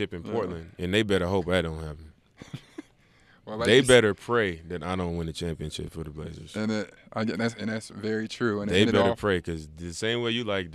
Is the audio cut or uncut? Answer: cut